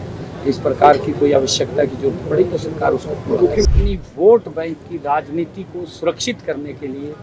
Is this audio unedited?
no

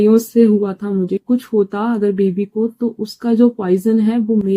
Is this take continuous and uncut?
no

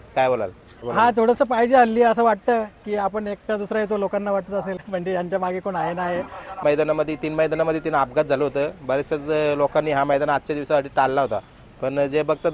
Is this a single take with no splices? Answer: no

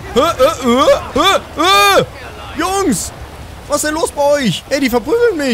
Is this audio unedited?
no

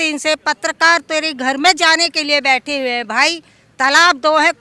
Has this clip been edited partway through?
no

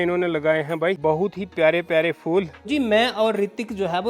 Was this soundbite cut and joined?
yes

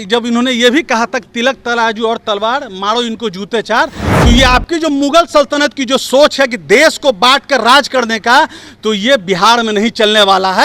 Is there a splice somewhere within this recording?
no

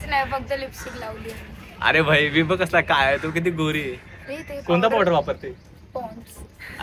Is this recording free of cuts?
yes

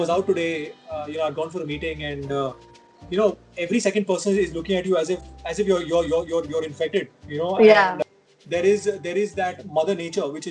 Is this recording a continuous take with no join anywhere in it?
no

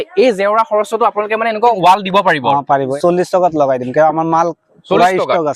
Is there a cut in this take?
yes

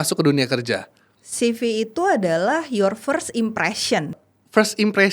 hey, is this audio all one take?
no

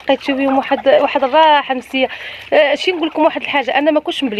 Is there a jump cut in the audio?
no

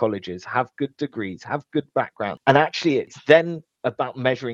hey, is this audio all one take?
no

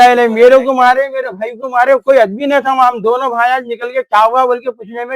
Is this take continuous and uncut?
yes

